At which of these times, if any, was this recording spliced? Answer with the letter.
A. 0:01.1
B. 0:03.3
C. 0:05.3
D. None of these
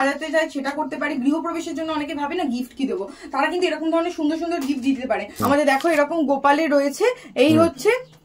C